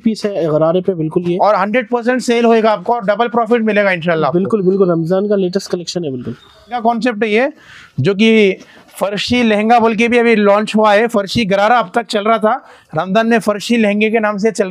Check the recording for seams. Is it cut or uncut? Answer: cut